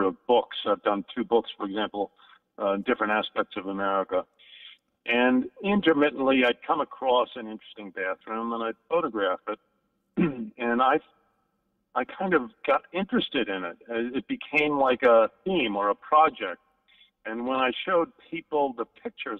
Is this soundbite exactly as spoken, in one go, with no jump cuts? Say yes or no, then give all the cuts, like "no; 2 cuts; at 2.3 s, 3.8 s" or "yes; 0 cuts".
yes; 0 cuts